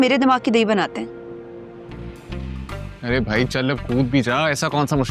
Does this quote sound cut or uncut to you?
cut